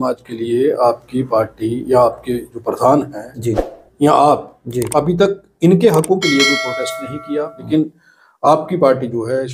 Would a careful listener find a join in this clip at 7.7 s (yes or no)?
yes